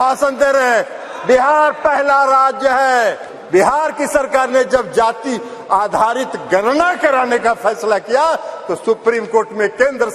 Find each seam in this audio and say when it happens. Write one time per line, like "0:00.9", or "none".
0:03.3